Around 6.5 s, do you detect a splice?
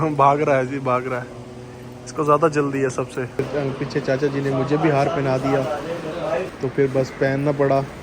yes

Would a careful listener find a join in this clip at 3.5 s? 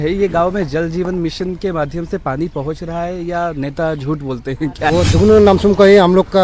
no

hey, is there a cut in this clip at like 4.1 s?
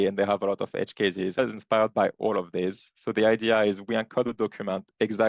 no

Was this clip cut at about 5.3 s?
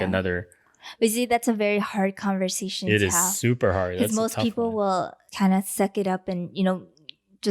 yes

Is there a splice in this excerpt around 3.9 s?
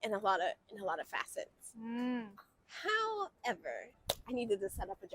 yes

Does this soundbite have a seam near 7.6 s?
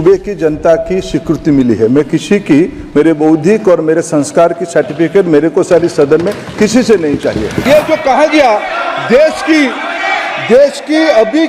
yes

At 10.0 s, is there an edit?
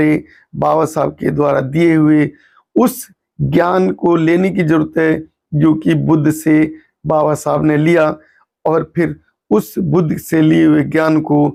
no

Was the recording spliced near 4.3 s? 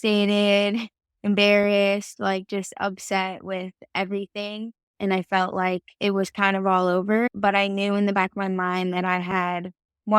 no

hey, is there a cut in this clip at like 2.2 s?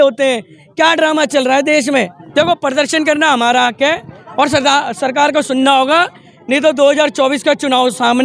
yes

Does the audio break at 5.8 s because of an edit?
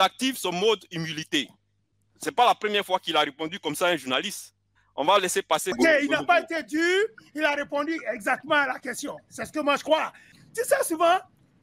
yes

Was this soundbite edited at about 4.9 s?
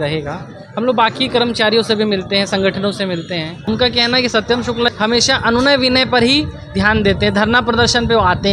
yes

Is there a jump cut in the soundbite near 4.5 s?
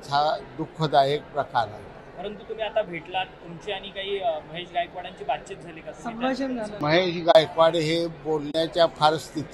no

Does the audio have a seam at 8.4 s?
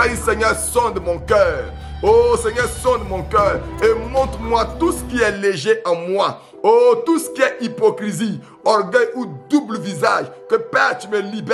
no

